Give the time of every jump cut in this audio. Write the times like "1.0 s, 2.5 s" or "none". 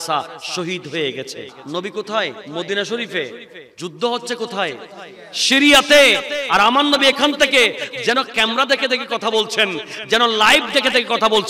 1.5 s, 2.4 s